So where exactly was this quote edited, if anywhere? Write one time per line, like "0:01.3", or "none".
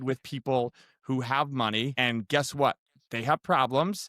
0:01.9